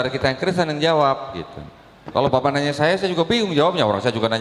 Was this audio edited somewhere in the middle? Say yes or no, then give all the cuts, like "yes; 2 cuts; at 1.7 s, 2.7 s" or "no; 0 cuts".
no; 0 cuts